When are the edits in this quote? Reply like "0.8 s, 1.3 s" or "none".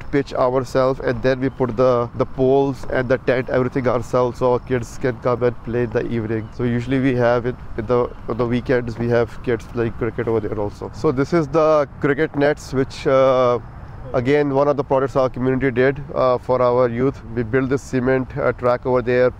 none

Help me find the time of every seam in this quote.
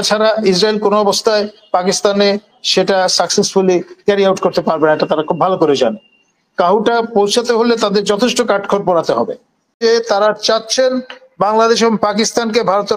9.8 s

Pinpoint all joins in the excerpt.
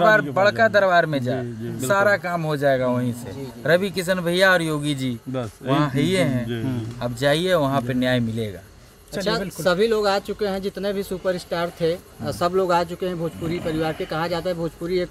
none

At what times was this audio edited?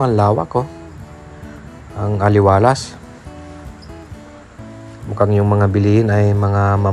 none

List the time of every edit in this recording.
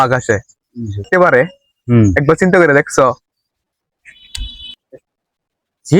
1.1 s

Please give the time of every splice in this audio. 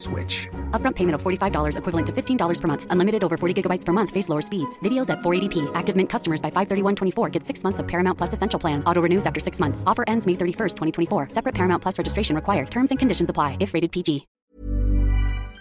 14.3 s

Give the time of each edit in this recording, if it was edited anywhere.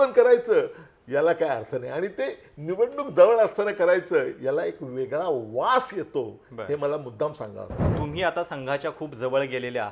7.9 s

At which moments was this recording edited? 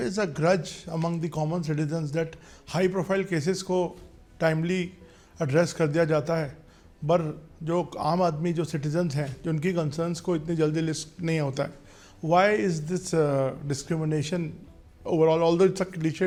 none

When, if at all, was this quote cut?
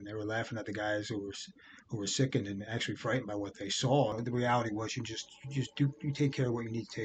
4.1 s

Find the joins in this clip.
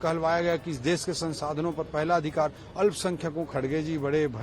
3.5 s

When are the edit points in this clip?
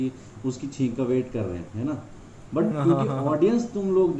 none

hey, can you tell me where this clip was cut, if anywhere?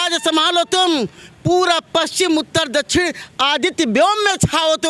none

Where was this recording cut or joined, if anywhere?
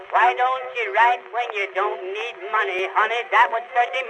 2.8 s

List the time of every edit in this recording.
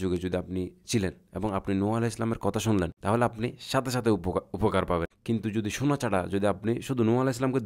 3.0 s, 5.1 s

